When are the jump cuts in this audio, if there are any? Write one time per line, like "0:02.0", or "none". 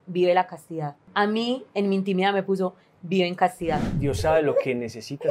0:01.0
0:03.9